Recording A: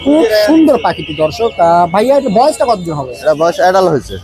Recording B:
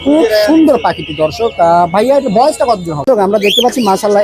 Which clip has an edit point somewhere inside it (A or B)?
B